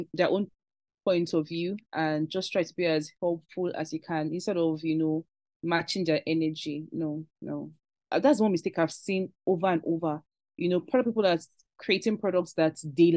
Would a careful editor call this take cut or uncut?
cut